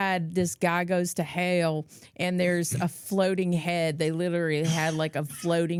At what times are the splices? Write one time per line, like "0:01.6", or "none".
none